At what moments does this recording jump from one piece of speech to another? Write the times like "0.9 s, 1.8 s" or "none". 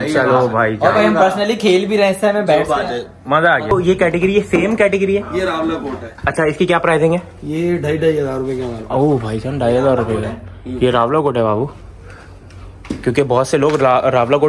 3.7 s

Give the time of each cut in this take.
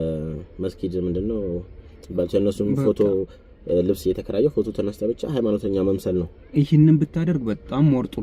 none

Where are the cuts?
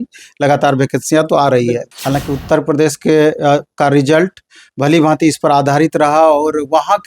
1.9 s

